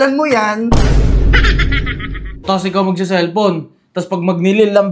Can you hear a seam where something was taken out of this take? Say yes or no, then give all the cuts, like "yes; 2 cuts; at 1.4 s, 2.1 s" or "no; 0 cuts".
yes; 1 cut; at 2.4 s